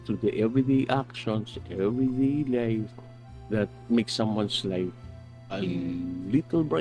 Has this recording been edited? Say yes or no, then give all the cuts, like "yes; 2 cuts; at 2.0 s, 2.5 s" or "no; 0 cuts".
no; 0 cuts